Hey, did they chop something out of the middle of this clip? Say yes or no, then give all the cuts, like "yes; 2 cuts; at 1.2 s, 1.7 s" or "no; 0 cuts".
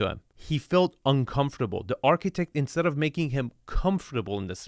no; 0 cuts